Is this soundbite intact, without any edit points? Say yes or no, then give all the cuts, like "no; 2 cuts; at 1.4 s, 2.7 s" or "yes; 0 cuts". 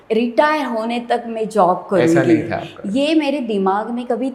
yes; 0 cuts